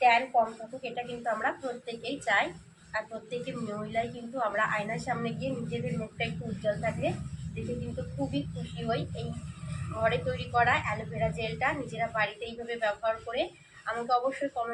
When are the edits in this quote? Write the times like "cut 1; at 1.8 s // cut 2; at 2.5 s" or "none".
none